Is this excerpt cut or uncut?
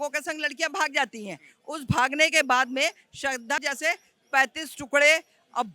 cut